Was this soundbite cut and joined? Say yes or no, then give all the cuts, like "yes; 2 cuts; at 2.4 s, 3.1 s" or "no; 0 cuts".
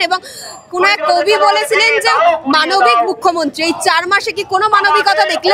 no; 0 cuts